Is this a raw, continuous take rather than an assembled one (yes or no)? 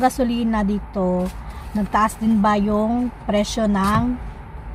yes